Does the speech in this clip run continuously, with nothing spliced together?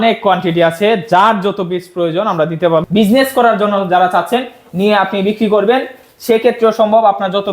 no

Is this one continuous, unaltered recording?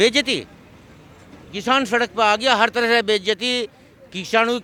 yes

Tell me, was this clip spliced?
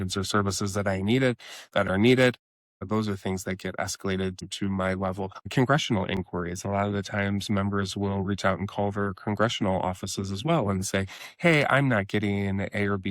yes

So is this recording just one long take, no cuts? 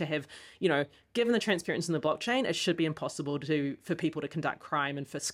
yes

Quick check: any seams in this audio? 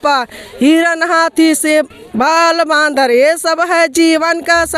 no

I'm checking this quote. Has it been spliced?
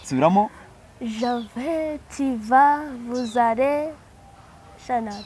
no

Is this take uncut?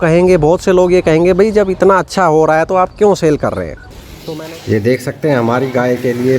no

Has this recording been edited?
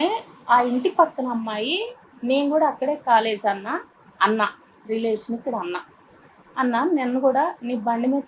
no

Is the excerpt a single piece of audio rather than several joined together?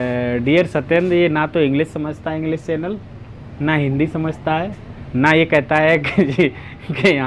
yes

